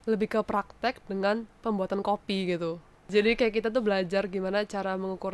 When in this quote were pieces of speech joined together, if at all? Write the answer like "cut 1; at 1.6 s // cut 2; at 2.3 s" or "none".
cut 1; at 3.0 s